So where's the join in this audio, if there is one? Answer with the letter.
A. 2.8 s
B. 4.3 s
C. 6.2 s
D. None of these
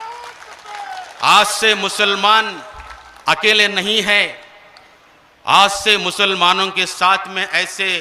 D